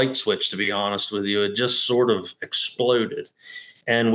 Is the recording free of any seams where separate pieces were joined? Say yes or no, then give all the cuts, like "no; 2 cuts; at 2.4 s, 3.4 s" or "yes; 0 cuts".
yes; 0 cuts